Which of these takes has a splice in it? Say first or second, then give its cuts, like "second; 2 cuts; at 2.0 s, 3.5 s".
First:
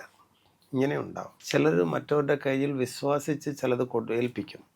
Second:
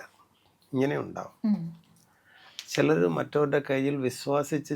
first; 1 cut; at 1.2 s